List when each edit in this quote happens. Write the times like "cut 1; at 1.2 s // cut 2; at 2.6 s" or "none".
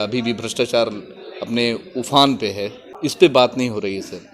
cut 1; at 2.7 s